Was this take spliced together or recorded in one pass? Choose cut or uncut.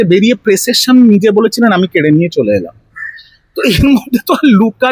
uncut